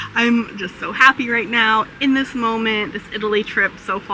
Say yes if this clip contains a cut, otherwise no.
no